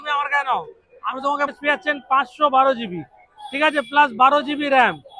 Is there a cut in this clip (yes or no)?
yes